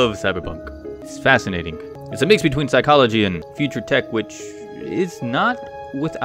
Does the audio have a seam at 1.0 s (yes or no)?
yes